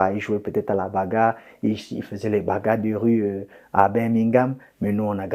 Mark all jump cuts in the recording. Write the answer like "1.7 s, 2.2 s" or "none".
none